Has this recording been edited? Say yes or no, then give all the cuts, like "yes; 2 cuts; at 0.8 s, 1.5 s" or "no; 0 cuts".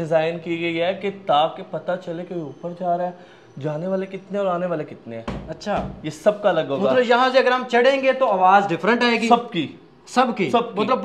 no; 0 cuts